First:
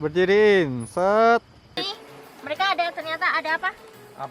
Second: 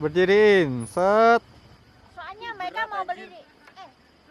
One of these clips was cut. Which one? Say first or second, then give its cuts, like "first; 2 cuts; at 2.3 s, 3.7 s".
first; 1 cut; at 1.8 s